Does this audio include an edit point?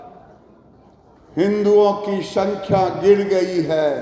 no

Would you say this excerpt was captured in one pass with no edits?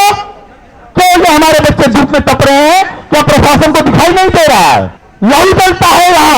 no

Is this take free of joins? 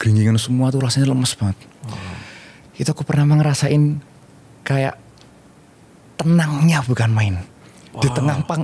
yes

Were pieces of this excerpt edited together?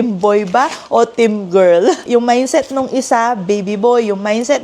yes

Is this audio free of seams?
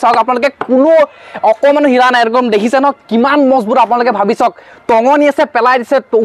yes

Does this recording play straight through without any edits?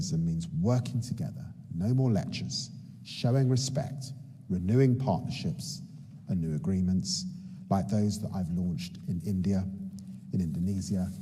yes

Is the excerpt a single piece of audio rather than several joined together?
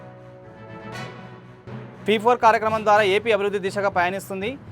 yes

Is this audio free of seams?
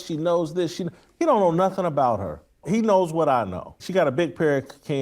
no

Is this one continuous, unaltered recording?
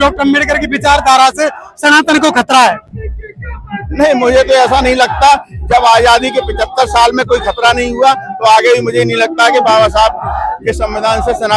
yes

